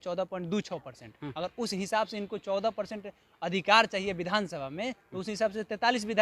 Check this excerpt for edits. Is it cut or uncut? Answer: uncut